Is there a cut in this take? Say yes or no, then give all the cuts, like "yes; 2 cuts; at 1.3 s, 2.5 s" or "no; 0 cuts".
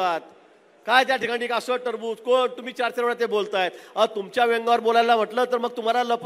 no; 0 cuts